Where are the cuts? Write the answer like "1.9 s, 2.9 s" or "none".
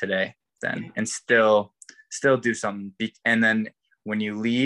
none